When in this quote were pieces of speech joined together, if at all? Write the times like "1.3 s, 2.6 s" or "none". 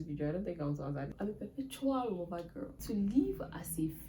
1.1 s, 2.8 s